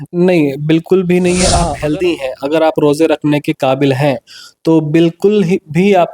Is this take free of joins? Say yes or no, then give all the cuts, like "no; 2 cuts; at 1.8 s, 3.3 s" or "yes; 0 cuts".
no; 1 cut; at 1.5 s